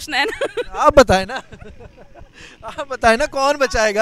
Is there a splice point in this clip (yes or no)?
no